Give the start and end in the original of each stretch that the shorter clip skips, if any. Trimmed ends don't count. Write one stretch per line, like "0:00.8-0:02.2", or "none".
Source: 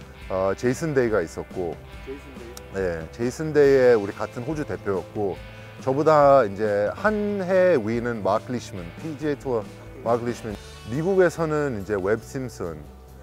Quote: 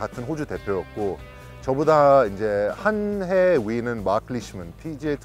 none